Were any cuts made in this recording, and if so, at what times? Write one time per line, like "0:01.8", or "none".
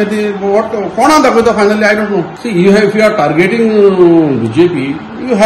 0:02.4